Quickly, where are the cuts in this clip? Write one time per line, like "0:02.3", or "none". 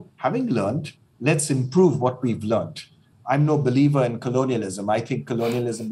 0:03.1